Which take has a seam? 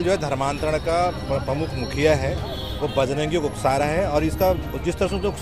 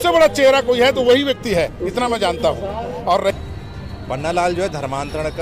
second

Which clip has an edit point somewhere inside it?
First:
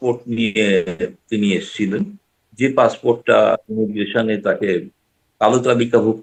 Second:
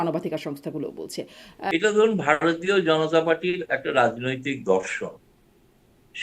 second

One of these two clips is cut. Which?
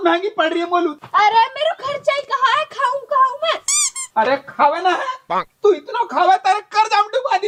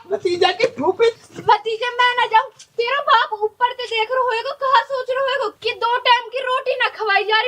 second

